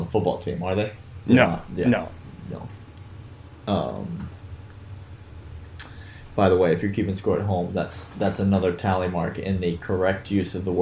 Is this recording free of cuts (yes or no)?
yes